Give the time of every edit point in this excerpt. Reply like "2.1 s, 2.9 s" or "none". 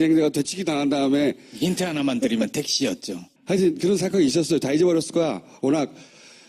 none

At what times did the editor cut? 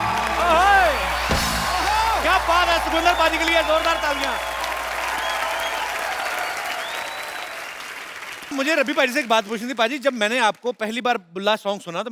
8.5 s

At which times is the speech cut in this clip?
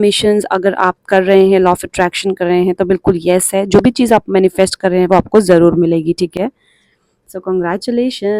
none

